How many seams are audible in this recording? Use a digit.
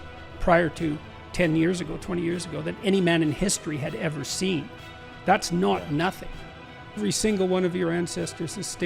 1